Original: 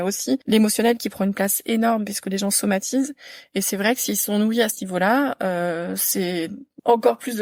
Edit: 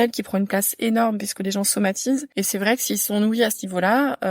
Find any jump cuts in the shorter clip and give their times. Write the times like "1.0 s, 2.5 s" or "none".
2.3 s